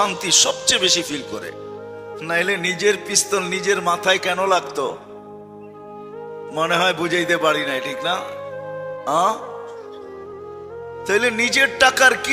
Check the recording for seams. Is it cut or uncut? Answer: cut